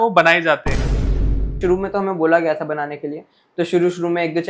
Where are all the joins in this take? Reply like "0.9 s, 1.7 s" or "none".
1.2 s